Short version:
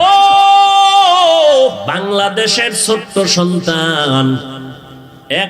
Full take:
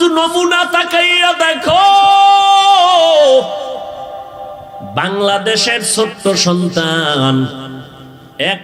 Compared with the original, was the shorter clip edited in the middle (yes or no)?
yes